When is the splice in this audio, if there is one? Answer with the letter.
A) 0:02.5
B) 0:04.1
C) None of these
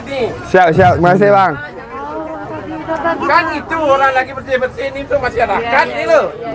C